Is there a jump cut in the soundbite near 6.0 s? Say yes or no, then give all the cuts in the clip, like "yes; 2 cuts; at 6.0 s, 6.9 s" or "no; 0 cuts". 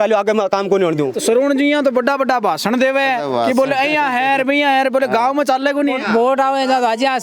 yes; 2 cuts; at 1.1 s, 6.0 s